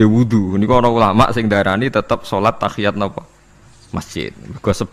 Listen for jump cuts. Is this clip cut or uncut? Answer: uncut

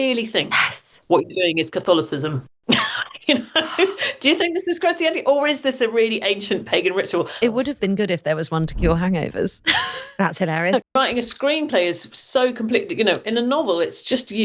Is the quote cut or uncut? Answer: cut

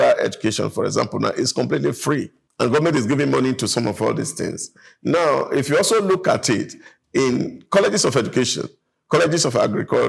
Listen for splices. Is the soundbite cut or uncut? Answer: cut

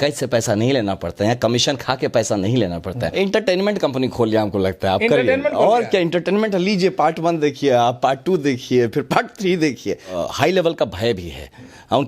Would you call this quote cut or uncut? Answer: cut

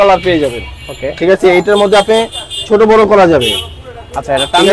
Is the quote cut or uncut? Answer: uncut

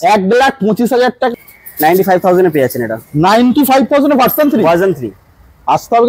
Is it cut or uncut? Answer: cut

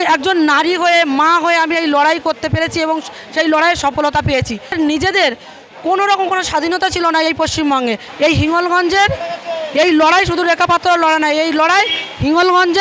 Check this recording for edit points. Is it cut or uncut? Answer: cut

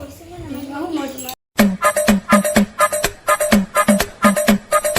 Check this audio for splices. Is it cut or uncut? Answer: cut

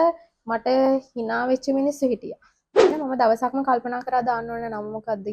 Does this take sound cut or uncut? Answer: cut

